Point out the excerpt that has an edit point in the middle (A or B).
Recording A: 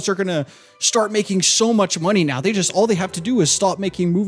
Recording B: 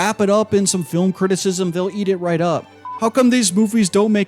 B